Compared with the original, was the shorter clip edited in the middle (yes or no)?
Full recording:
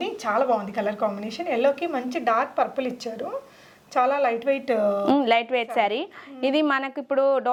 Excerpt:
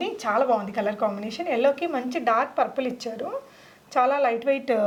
no